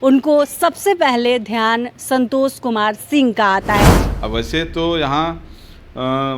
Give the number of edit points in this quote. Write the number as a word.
one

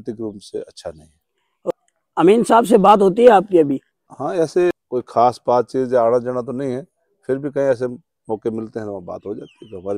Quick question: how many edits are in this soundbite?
two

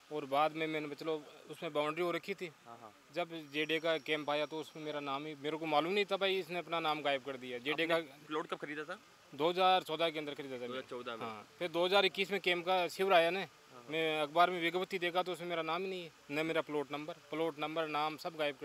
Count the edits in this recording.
zero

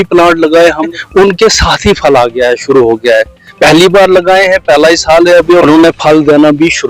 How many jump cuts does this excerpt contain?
two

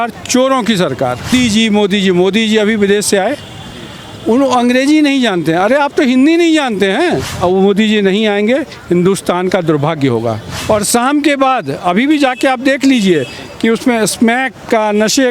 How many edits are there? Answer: three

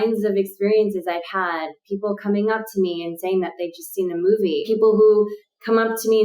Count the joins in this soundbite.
one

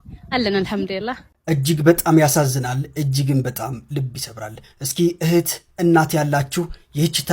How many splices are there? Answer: one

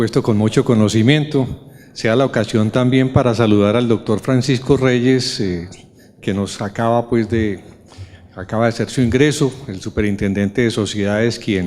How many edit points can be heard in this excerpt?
one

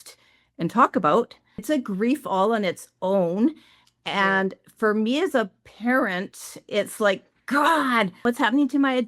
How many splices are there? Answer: two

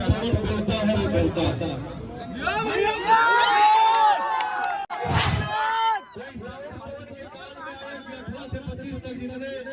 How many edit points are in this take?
one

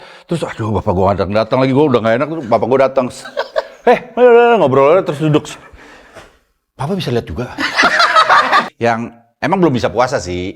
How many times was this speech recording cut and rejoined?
one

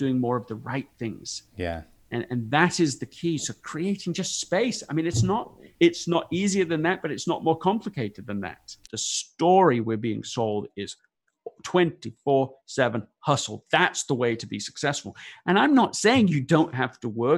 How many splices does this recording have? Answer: two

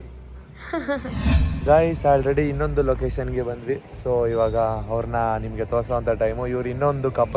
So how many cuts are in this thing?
one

